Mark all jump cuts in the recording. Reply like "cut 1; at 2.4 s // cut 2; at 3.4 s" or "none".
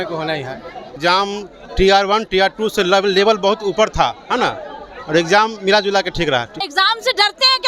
cut 1; at 1.0 s // cut 2; at 6.5 s